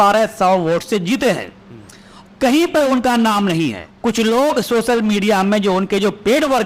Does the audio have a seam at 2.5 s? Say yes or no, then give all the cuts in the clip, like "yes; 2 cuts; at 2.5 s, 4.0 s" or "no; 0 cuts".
no; 1 cut; at 3.9 s